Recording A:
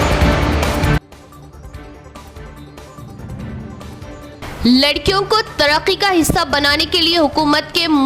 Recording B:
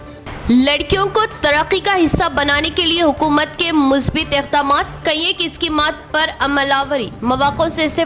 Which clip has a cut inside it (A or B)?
A